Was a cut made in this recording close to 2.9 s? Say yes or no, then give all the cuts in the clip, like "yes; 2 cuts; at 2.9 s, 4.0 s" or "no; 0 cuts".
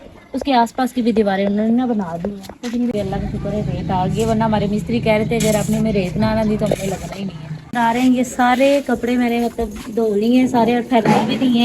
yes; 2 cuts; at 2.9 s, 7.7 s